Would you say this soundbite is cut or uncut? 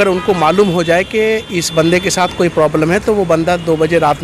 uncut